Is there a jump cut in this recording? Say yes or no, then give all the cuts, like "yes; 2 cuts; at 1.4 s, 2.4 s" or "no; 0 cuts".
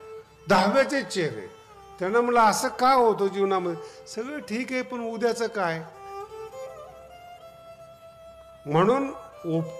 yes; 2 cuts; at 5.9 s, 8.0 s